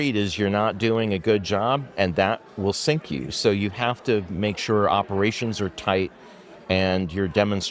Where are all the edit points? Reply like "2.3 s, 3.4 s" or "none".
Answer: none